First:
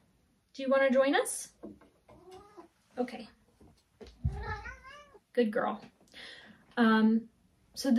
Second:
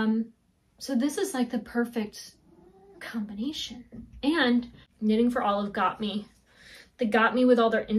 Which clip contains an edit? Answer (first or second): second